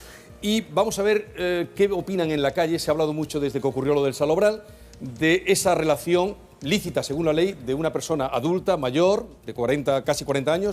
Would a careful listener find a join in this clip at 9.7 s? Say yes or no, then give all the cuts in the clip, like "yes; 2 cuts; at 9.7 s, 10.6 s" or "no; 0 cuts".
no; 1 cut; at 2.8 s